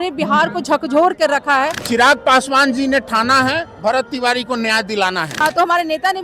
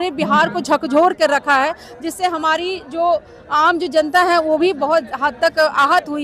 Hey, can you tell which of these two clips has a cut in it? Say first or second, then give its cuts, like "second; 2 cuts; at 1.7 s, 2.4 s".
first; 2 cuts; at 1.8 s, 5.3 s